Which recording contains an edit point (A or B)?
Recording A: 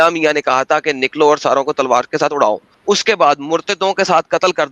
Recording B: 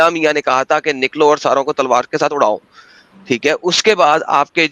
A